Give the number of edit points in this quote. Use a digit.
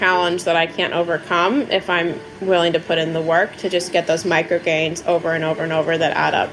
0